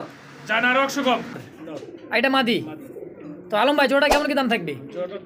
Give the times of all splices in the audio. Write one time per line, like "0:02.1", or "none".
0:01.5